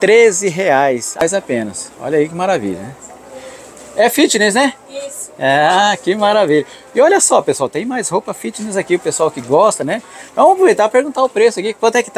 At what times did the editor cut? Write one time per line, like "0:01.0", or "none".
0:01.2